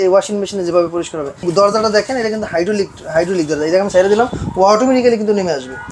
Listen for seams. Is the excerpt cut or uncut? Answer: cut